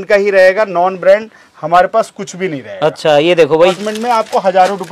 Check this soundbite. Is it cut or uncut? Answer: cut